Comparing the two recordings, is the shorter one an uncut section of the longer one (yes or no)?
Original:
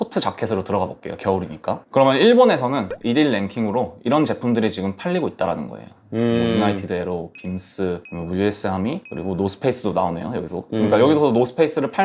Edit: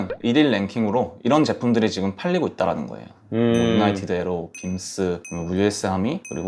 yes